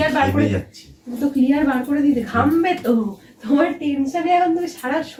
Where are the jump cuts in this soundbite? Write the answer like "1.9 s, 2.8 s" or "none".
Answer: none